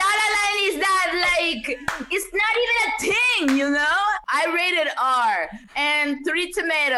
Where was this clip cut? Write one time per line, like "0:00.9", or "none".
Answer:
0:04.2
0:05.6